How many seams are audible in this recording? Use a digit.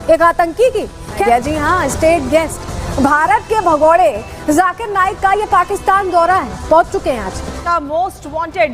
2